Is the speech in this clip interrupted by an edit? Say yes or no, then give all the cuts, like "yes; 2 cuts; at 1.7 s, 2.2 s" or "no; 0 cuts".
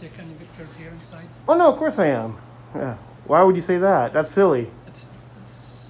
no; 0 cuts